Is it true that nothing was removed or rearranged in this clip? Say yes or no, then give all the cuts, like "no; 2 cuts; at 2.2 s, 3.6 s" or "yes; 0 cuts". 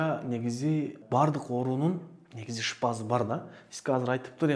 no; 1 cut; at 1.0 s